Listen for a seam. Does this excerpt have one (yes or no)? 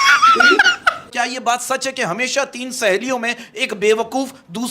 yes